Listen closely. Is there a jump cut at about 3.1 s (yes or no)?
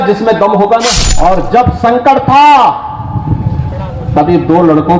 no